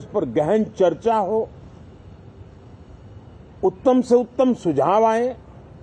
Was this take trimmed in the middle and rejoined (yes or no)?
no